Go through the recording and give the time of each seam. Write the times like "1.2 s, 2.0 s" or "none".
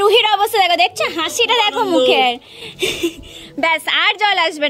none